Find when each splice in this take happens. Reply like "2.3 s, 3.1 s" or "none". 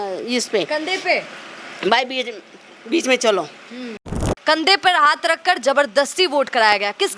4.2 s